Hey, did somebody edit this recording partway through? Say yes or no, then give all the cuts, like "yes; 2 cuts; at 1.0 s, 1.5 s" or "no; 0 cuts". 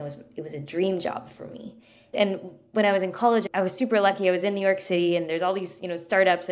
yes; 2 cuts; at 2.1 s, 3.4 s